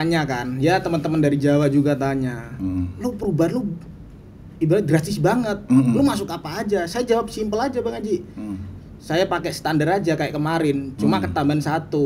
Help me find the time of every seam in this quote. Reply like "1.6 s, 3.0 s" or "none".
none